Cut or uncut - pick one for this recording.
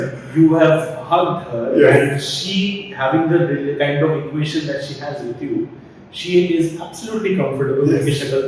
uncut